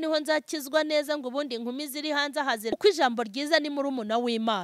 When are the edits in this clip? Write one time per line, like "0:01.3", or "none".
0:02.7